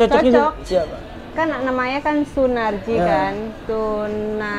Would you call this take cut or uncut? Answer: cut